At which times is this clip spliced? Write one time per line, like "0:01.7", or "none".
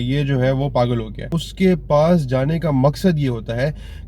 0:01.4